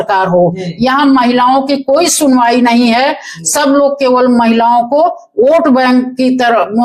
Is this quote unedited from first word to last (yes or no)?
yes